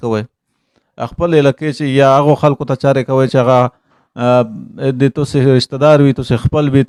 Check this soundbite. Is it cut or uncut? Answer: uncut